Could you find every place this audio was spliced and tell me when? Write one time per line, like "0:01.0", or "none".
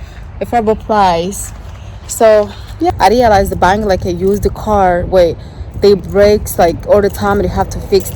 0:02.9